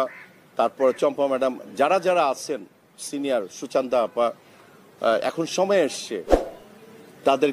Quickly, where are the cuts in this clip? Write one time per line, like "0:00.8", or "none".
none